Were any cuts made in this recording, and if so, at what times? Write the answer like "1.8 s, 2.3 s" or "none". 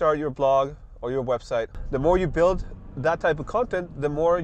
1.8 s